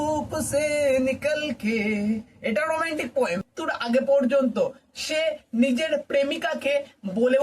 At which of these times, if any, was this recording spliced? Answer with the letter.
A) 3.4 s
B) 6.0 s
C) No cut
A